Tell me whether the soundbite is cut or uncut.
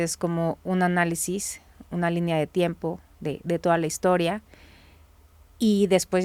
uncut